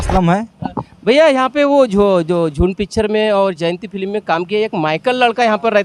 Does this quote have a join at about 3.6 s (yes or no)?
no